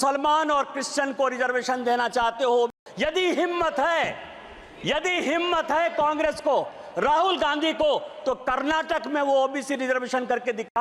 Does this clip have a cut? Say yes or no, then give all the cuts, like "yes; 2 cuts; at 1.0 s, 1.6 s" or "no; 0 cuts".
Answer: yes; 1 cut; at 2.8 s